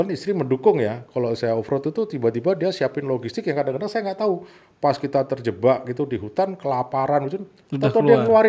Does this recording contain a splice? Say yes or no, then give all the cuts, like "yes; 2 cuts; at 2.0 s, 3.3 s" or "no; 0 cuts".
no; 0 cuts